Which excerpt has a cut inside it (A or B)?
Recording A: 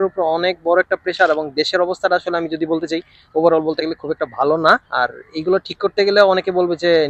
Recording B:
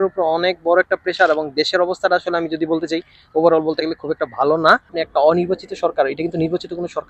B